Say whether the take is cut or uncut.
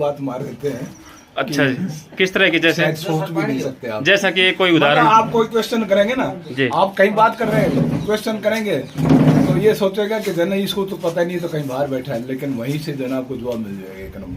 uncut